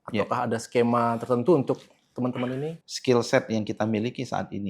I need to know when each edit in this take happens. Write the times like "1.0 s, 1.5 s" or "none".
2.8 s